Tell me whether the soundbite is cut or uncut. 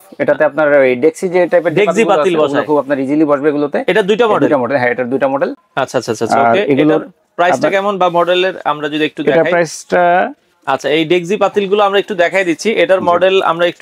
uncut